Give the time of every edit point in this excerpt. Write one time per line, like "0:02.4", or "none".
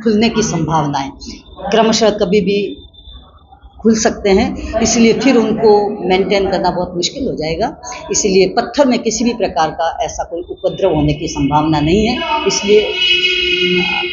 none